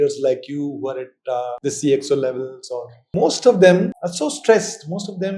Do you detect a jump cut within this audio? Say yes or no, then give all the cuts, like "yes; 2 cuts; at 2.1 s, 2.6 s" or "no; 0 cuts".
yes; 3 cuts; at 1.6 s, 3.1 s, 4.0 s